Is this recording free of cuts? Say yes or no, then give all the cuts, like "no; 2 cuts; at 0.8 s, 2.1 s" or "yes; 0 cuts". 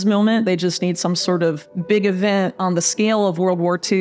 no; 1 cut; at 1.7 s